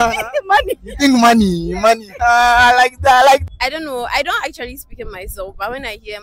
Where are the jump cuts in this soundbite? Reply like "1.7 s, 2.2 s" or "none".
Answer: 3.4 s